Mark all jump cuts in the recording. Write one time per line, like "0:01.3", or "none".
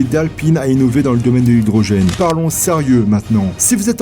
0:02.1